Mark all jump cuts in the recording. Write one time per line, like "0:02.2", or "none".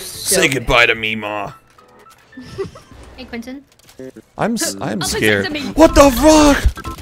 0:02.8